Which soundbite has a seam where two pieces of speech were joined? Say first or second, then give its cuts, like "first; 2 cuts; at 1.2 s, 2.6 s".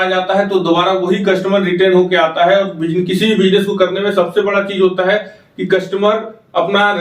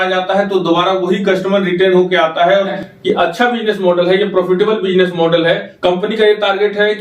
second; 2 cuts; at 2.8 s, 5.7 s